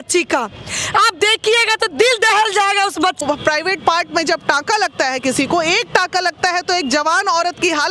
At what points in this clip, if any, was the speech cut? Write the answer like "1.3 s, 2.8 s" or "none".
3.2 s